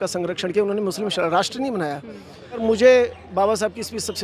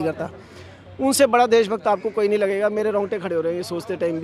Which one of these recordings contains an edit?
first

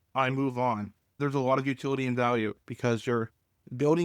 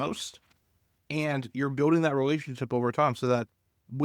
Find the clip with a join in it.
first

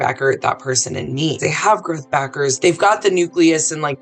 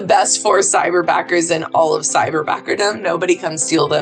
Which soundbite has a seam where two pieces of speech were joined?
first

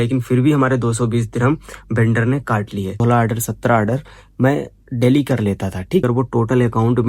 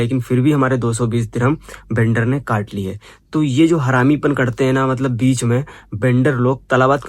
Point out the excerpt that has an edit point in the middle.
first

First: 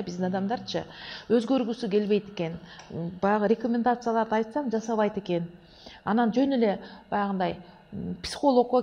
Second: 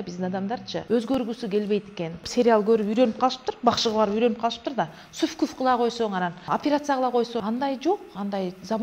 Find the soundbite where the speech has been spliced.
second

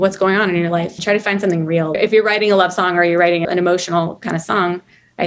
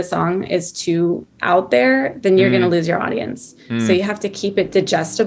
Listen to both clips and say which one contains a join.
first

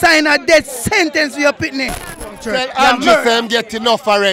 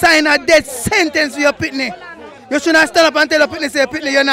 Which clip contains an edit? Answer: first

